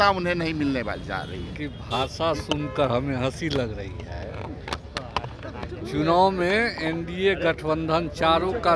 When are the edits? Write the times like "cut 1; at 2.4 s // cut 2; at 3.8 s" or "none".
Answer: cut 1; at 1.5 s